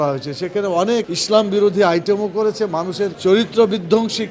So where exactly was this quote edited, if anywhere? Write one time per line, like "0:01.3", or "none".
0:03.2